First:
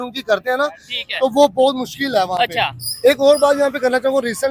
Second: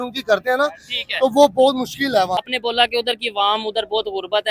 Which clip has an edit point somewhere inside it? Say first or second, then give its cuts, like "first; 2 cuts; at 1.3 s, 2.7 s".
second; 1 cut; at 2.4 s